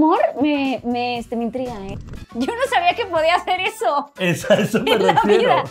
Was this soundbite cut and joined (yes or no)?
yes